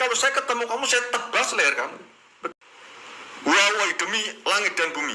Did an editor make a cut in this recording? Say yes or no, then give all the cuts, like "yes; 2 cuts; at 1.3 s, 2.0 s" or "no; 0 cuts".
yes; 1 cut; at 2.5 s